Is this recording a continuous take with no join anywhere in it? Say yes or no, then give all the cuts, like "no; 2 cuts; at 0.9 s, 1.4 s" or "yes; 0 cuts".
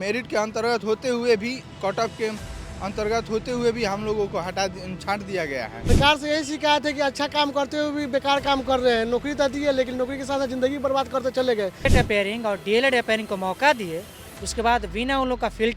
no; 2 cuts; at 5.9 s, 11.9 s